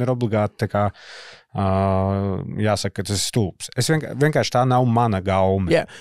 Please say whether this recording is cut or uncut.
uncut